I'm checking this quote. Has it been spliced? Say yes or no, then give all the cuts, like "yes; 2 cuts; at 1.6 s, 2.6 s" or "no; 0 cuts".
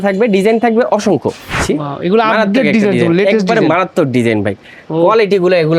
yes; 1 cut; at 1.5 s